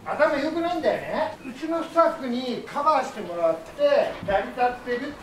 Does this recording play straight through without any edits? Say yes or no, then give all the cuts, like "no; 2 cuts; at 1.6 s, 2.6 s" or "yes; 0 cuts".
no; 2 cuts; at 1.4 s, 4.2 s